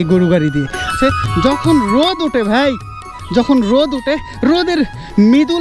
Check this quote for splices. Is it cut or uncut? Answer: cut